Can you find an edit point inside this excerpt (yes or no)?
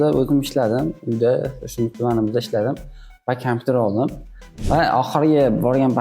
yes